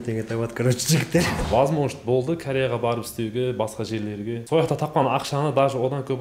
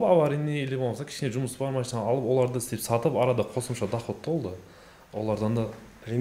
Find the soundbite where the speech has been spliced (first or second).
first